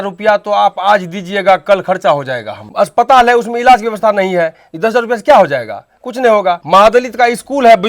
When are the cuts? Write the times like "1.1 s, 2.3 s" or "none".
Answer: 2.6 s, 6.6 s